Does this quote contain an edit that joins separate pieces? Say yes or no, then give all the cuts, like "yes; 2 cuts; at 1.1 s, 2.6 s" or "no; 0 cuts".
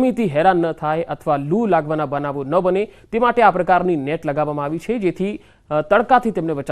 no; 0 cuts